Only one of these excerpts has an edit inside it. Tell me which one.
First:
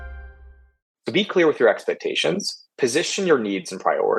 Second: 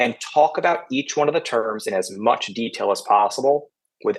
first; 1 cut; at 1.0 s

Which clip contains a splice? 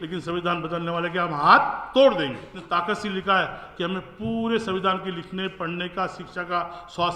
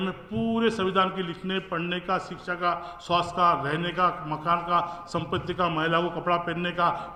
first; 1 cut; at 2.5 s

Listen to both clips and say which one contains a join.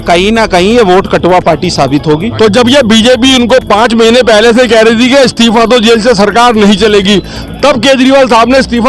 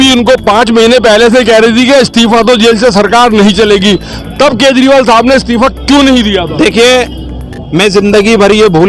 first; 1 cut; at 2.3 s

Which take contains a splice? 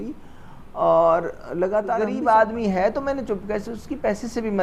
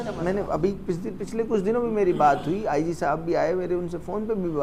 first; 1 cut; at 2.0 s

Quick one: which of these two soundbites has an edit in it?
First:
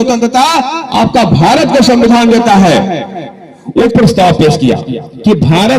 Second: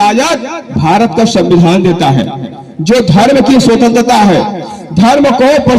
first; 1 cut; at 3.8 s

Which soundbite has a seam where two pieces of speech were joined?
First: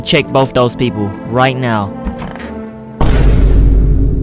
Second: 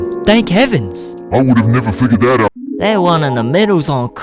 second; 1 cut; at 2.6 s

